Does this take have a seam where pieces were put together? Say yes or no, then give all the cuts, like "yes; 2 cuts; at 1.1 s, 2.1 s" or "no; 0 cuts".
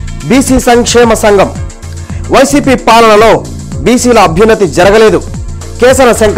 no; 0 cuts